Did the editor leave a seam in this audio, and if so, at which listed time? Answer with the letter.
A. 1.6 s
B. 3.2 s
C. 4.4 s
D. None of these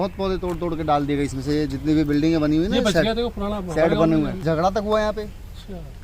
C